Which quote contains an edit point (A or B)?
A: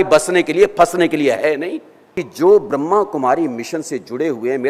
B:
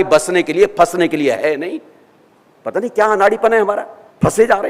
A